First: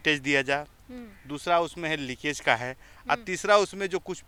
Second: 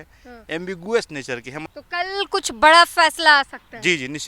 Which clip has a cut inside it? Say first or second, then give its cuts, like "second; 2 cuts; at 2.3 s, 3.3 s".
second; 1 cut; at 1.6 s